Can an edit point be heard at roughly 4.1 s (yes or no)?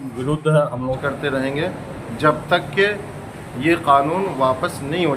no